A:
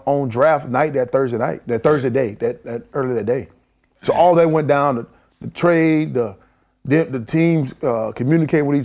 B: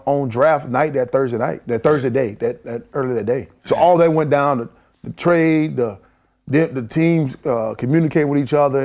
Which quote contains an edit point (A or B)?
B